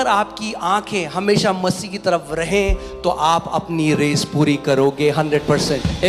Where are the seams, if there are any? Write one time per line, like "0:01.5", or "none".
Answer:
none